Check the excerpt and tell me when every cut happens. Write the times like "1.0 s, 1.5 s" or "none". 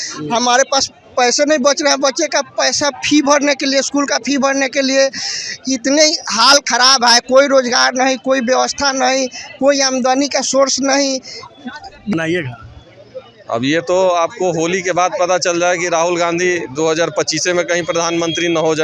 12.1 s